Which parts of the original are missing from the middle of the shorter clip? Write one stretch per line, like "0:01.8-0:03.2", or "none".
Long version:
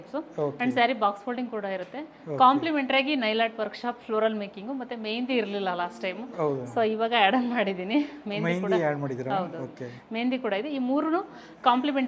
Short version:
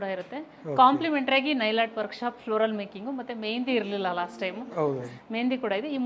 0:06.7-0:09.8